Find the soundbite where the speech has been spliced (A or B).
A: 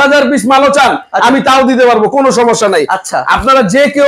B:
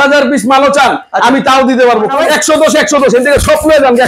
B